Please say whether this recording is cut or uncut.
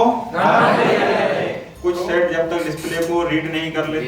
cut